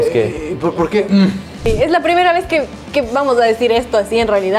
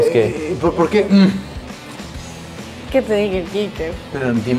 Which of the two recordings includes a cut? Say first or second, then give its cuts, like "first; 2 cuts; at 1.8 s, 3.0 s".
first; 2 cuts; at 1.7 s, 2.8 s